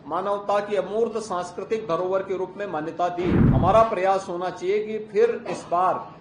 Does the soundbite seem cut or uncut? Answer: cut